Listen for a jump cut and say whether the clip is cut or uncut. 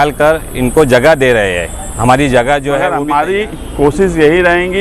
cut